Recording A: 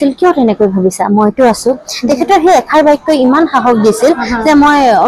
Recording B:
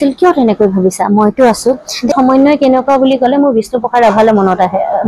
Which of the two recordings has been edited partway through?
B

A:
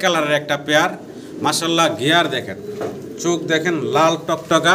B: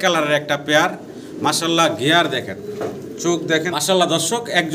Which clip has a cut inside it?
B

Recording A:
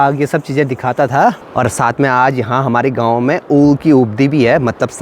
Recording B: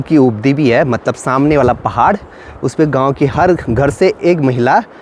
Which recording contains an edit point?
A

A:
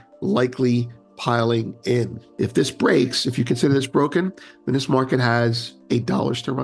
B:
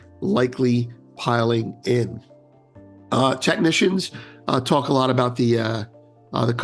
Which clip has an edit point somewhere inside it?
A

